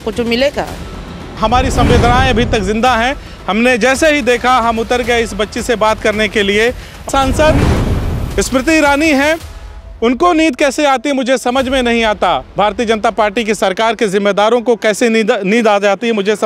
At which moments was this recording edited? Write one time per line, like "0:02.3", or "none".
0:01.3
0:07.0